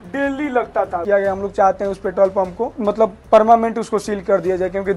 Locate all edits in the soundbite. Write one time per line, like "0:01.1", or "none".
0:01.0
0:02.8